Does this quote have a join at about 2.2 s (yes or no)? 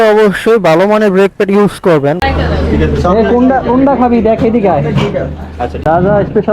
yes